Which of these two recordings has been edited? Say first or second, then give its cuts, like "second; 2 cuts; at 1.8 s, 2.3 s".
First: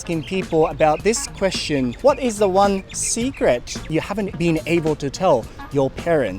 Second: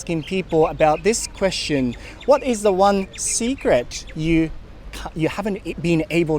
first; 2 cuts; at 1.9 s, 4.0 s